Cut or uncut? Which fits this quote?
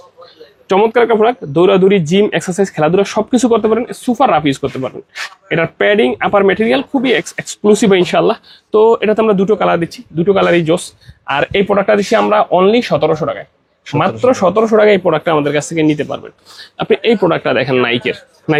uncut